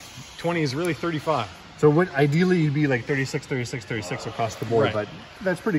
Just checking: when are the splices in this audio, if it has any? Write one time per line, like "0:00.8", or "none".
none